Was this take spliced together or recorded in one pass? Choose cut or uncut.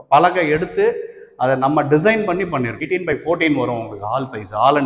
cut